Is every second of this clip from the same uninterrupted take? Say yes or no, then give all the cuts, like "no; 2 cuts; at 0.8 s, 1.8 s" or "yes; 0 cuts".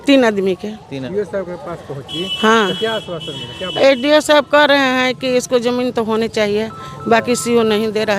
no; 1 cut; at 0.9 s